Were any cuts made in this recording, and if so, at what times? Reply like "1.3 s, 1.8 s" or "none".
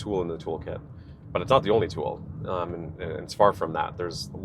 none